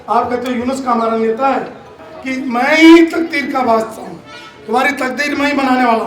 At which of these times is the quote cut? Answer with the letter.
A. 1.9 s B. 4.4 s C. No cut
A